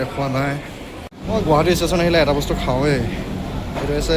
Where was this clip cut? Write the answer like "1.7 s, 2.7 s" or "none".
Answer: 1.0 s